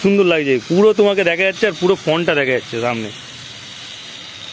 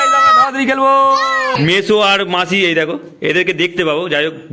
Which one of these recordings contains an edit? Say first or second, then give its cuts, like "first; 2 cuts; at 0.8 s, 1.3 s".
second; 1 cut; at 1.6 s